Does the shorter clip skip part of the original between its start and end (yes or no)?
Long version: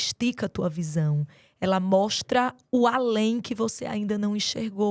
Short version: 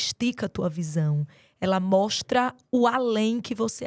no